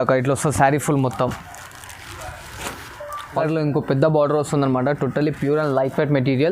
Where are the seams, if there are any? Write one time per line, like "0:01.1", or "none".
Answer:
0:03.4